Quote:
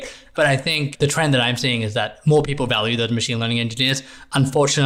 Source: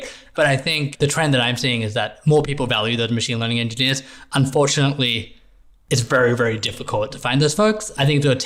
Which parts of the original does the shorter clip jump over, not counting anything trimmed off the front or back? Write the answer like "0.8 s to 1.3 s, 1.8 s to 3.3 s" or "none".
none